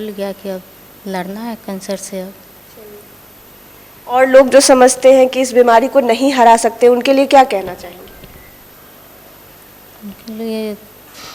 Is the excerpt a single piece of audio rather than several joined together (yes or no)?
yes